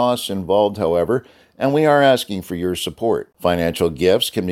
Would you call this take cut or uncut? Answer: uncut